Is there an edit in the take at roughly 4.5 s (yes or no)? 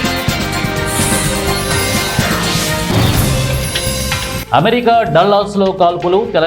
yes